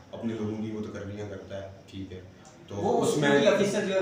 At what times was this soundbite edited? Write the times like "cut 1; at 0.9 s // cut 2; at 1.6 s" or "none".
none